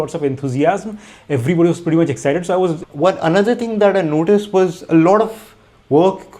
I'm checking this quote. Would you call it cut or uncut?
cut